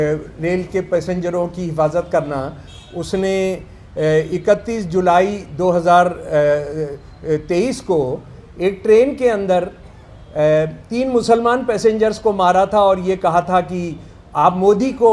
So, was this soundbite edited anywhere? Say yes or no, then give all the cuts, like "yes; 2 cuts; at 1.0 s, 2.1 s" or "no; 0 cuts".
no; 0 cuts